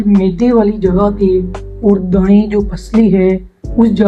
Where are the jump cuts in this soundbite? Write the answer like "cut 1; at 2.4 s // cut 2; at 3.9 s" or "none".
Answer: none